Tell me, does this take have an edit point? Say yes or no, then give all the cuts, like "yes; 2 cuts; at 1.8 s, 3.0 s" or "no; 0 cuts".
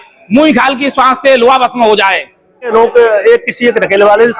yes; 1 cut; at 2.7 s